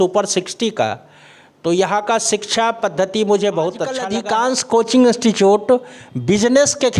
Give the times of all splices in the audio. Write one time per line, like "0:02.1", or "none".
0:04.1